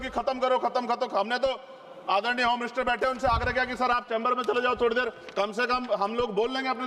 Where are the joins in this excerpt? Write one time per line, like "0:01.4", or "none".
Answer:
none